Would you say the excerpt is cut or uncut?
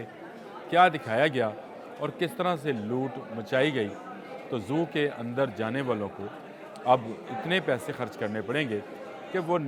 uncut